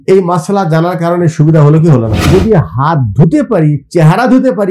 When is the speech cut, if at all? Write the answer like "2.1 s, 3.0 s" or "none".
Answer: 2.2 s